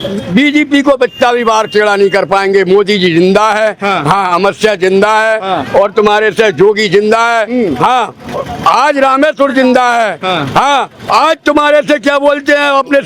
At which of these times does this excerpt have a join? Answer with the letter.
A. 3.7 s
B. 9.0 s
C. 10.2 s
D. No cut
D